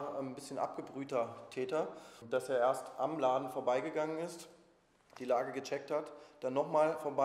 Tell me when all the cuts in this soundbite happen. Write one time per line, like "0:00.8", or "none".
0:02.1

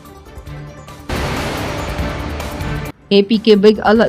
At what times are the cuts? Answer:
0:01.0
0:02.6

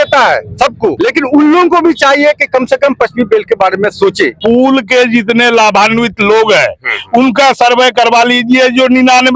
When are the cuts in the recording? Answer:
0:01.0
0:04.3

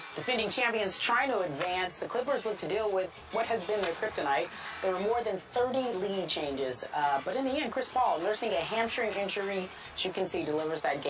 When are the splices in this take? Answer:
none

